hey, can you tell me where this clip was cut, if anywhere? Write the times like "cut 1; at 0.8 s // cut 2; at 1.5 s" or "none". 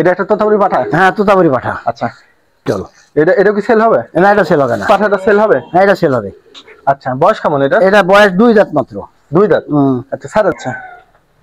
cut 1; at 2.7 s // cut 2; at 4.9 s // cut 3; at 10.5 s